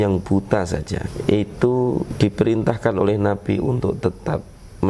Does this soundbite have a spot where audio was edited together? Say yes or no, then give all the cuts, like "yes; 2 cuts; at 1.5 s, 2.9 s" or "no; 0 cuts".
yes; 2 cuts; at 1.0 s, 2.1 s